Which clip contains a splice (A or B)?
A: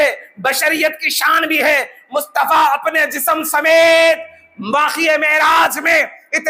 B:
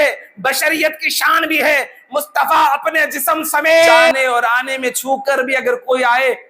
B